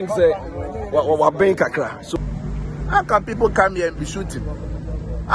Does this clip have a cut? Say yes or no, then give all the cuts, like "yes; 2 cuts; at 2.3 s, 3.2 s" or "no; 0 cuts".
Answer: yes; 1 cut; at 2.0 s